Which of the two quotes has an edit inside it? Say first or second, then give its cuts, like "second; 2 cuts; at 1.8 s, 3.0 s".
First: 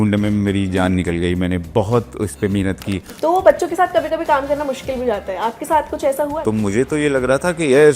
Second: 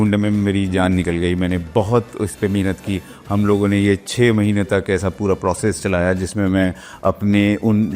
first; 2 cuts; at 3.1 s, 6.4 s